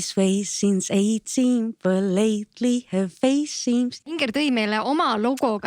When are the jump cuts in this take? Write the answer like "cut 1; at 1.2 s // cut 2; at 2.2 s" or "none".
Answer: cut 1; at 4.0 s